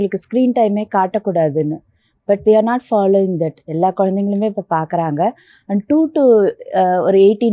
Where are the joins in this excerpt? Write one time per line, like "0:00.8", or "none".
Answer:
none